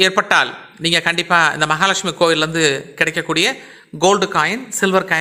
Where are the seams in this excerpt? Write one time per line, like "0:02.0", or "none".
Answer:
none